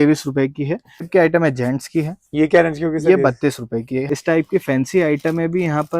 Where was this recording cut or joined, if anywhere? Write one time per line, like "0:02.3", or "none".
0:01.1
0:04.1